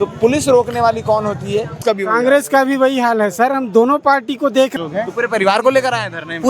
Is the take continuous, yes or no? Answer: no